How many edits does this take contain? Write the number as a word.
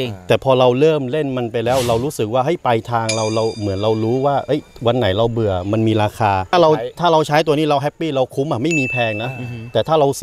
one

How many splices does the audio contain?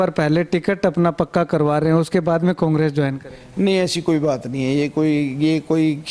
zero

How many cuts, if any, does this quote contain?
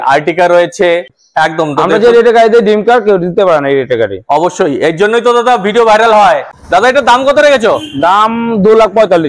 two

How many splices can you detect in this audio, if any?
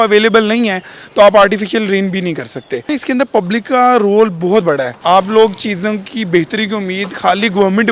two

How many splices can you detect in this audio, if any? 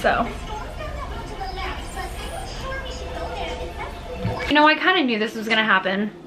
one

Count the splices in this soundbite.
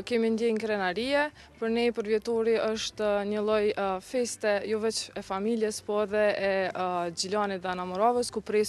zero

